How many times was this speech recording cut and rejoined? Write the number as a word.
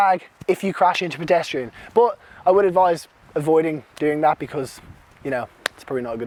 zero